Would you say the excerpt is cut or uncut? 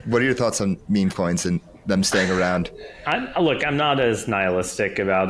uncut